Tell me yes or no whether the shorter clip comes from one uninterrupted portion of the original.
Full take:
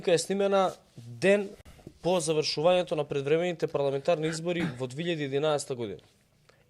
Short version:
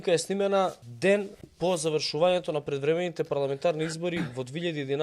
no